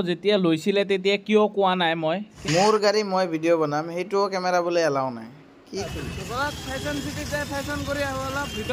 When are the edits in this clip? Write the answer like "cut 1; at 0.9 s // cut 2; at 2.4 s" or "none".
cut 1; at 2.3 s // cut 2; at 5.8 s